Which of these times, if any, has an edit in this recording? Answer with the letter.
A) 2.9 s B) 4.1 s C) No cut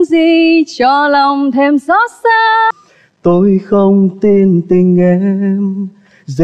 A